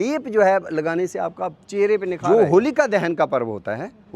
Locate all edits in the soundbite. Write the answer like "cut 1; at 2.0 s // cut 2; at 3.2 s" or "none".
cut 1; at 2.2 s